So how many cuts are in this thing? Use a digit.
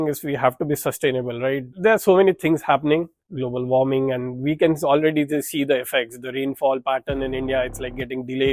2